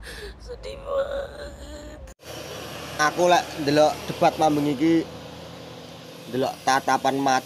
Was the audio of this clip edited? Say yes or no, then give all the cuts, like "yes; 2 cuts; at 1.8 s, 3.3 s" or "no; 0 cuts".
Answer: yes; 1 cut; at 2.2 s